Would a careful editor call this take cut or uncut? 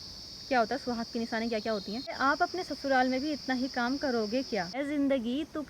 cut